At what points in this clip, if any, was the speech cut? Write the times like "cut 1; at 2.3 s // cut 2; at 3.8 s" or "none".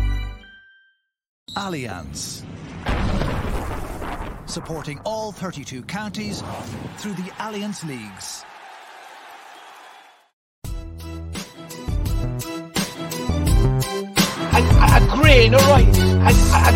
cut 1; at 1.7 s